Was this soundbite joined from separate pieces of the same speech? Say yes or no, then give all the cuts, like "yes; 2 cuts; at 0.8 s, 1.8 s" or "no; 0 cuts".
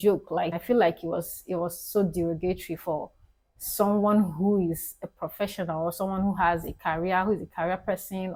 no; 0 cuts